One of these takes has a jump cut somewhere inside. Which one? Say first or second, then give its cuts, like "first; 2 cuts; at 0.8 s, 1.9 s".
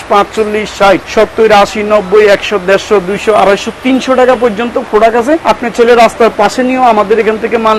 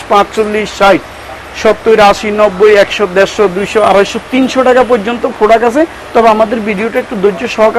first; 2 cuts; at 1.1 s, 5.4 s